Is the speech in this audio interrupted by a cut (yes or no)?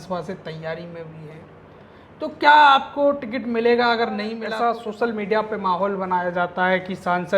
yes